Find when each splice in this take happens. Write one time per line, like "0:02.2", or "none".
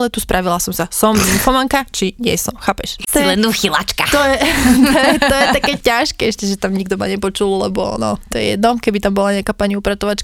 0:03.1